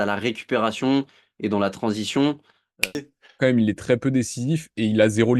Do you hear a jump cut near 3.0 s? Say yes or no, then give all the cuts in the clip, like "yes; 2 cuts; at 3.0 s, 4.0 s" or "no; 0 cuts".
yes; 1 cut; at 3.0 s